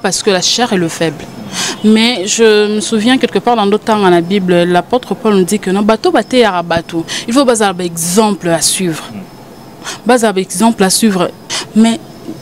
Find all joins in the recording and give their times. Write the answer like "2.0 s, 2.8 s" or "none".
11.4 s